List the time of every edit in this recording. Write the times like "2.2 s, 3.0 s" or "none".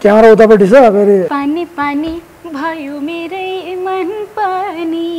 1.3 s